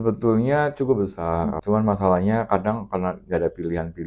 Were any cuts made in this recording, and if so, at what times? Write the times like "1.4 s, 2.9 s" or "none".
1.6 s